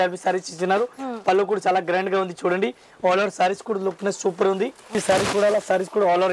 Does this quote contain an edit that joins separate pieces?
yes; 1 cut; at 4.9 s

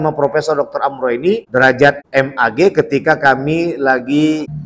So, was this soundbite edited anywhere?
yes; 2 cuts; at 1.4 s, 2.0 s

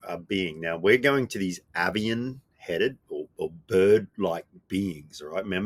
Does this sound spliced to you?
no; 0 cuts

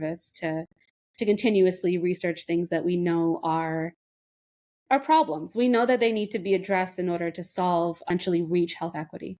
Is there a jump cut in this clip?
yes; 1 cut; at 8.1 s

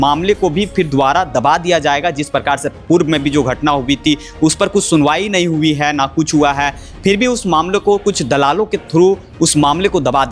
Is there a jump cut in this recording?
no; 0 cuts

